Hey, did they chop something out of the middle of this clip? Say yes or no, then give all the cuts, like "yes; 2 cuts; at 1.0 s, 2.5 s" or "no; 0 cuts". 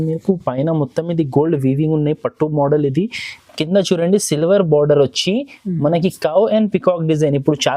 no; 0 cuts